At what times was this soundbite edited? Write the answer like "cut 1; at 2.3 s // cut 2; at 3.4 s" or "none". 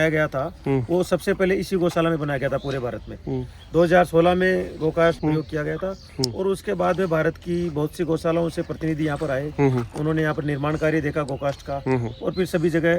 none